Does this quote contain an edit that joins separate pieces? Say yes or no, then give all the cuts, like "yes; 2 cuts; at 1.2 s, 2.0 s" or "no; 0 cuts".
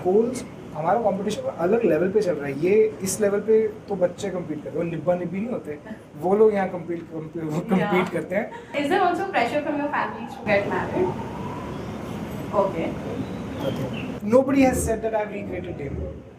yes; 2 cuts; at 8.8 s, 14.2 s